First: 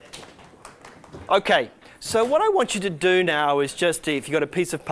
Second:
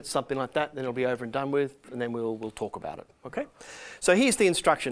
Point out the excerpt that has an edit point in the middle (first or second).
second